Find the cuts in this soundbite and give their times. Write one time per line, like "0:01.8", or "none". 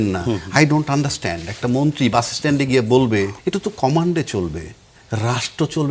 0:03.4